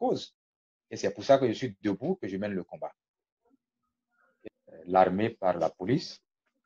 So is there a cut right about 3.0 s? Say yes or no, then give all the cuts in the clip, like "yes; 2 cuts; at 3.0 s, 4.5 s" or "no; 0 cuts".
no; 1 cut; at 4.3 s